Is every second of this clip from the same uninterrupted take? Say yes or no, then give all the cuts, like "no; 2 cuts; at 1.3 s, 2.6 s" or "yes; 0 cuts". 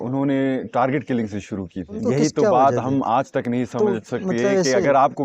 no; 1 cut; at 2.0 s